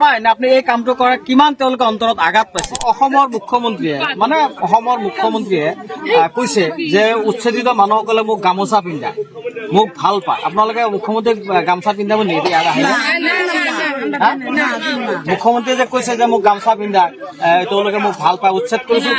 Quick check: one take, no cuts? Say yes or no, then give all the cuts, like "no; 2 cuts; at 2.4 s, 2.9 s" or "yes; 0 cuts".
no; 1 cut; at 2.8 s